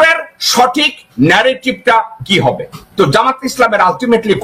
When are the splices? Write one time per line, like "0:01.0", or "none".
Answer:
0:02.8